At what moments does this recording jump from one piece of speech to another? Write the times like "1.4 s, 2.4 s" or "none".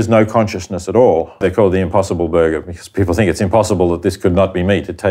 1.4 s